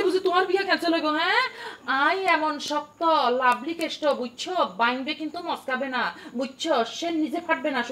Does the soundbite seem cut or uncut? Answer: uncut